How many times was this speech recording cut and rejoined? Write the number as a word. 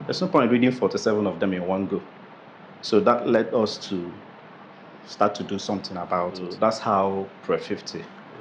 one